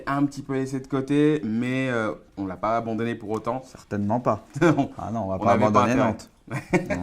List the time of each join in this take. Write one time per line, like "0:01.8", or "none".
0:02.3